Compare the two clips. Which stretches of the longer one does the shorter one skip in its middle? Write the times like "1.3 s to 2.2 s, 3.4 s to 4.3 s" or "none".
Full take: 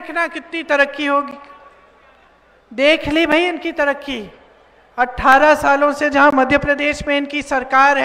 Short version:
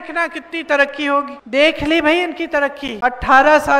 1.4 s to 2.6 s, 4.1 s to 4.8 s